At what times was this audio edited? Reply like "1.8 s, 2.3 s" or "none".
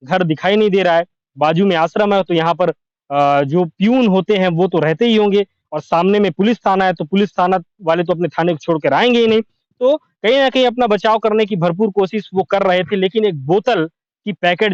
none